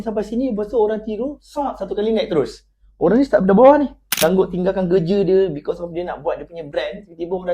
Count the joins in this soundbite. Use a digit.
1